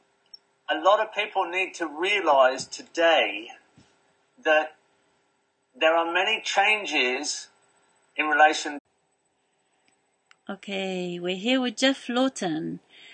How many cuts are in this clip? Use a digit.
0